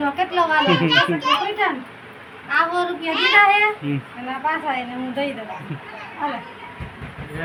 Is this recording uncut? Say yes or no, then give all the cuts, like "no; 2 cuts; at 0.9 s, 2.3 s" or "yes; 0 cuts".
yes; 0 cuts